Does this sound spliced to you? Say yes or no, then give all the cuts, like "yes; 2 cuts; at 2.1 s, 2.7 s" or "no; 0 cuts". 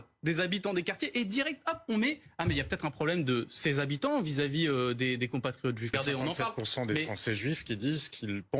yes; 1 cut; at 5.9 s